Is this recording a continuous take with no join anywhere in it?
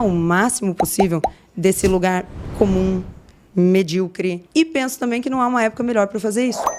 no; 1 cut; at 4.4 s

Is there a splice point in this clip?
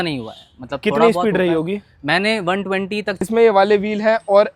yes; 1 cut; at 3.2 s

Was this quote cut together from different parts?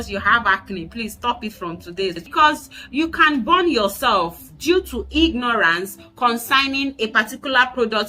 yes; 1 cut; at 2.2 s

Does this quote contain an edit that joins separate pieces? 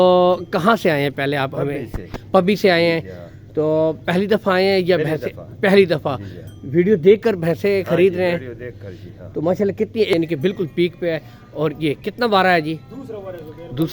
yes; 1 cut; at 10.1 s

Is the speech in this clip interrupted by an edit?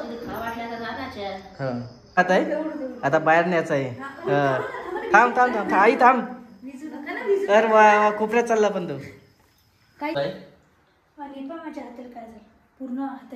yes; 2 cuts; at 2.2 s, 10.2 s

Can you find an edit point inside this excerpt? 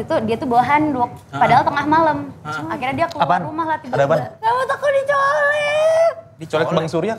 yes; 1 cut; at 4.3 s

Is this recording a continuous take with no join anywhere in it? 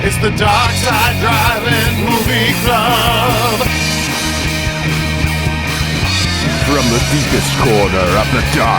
no; 1 cut; at 3.7 s

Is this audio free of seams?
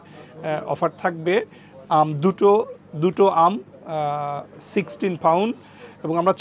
yes; 0 cuts

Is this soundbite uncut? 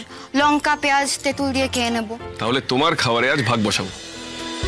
no; 1 cut; at 2.2 s

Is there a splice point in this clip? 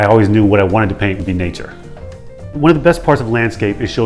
no; 0 cuts

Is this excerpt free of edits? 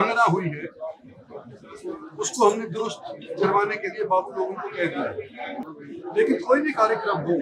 no; 1 cut; at 5.8 s

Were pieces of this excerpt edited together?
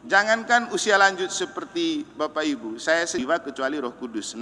yes; 1 cut; at 3.2 s

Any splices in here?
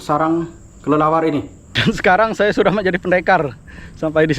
yes; 1 cut; at 1.6 s

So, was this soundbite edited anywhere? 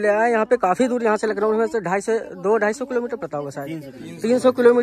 no; 0 cuts

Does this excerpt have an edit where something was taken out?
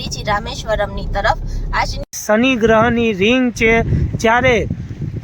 yes; 1 cut; at 2.2 s

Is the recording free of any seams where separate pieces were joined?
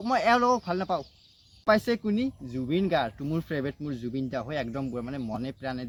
yes; 0 cuts

